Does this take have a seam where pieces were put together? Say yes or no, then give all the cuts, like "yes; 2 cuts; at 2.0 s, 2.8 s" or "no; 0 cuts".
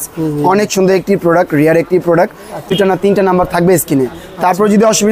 yes; 1 cut; at 2.7 s